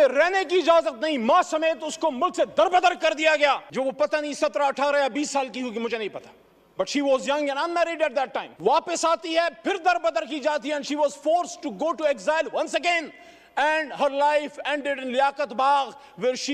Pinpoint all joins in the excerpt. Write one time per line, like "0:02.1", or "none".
none